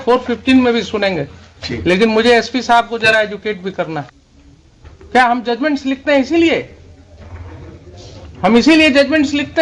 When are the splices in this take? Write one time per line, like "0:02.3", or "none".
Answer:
0:04.1

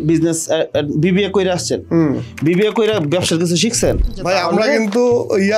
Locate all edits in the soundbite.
0:04.2

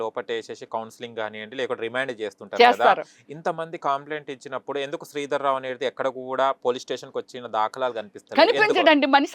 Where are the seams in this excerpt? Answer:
none

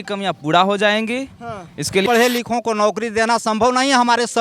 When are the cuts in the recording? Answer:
0:02.0

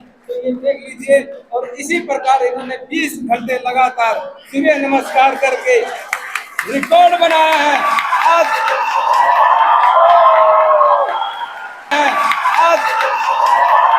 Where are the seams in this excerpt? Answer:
0:11.9

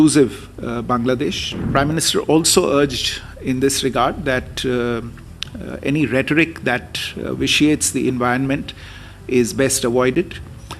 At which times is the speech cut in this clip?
0:01.6

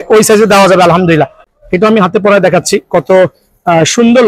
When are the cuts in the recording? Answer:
0:01.5

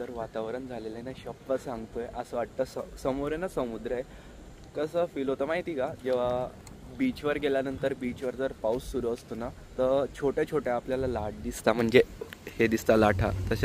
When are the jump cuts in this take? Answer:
none

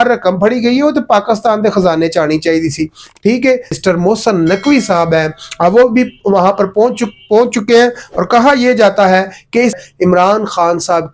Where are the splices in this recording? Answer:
0:03.8
0:09.8

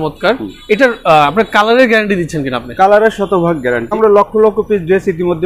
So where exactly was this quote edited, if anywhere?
0:03.9

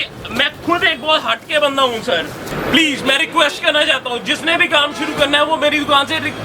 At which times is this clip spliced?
0:02.5

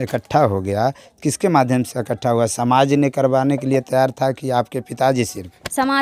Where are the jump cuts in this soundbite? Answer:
none

